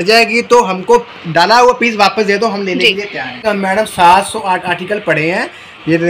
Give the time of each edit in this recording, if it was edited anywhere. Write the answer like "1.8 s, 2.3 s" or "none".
3.4 s